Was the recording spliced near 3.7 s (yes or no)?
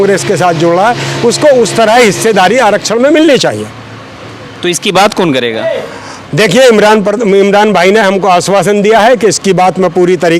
no